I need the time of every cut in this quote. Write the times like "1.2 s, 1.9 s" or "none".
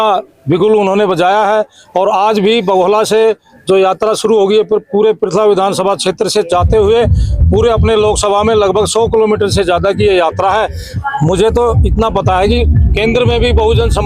10.8 s